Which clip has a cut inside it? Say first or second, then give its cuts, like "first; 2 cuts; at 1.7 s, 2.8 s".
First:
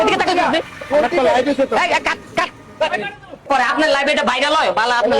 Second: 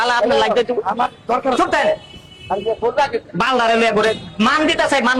first; 1 cut; at 3.5 s